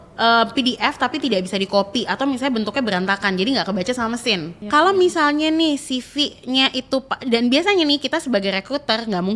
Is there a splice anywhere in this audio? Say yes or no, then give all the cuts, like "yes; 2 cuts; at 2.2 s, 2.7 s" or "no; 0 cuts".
yes; 1 cut; at 4.6 s